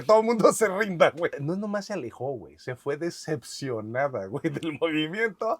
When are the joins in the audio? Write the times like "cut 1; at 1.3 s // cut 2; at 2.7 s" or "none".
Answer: cut 1; at 1.4 s